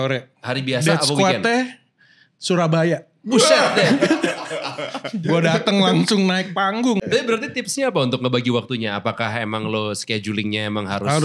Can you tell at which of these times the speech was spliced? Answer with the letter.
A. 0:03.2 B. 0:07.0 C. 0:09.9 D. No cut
B